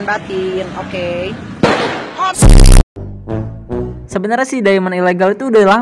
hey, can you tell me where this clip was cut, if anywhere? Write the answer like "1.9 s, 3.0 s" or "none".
3.9 s